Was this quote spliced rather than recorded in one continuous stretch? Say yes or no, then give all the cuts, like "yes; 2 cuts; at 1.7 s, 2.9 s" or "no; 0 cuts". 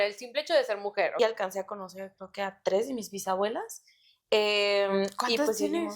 yes; 1 cut; at 1.2 s